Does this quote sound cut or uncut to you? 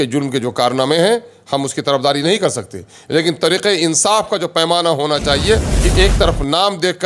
cut